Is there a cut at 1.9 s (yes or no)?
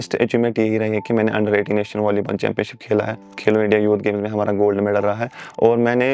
no